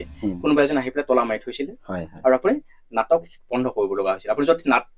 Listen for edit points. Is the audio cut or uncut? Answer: uncut